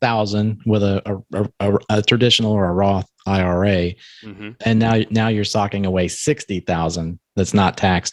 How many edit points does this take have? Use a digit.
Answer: 0